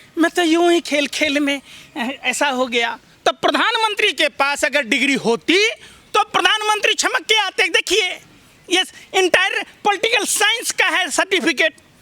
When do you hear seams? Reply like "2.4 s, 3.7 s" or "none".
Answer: 3.1 s